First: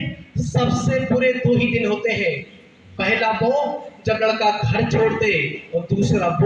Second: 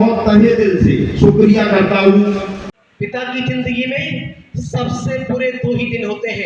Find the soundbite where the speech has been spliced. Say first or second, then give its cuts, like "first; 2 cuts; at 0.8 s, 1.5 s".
second; 1 cut; at 2.6 s